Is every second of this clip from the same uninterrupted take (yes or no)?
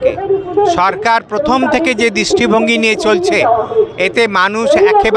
yes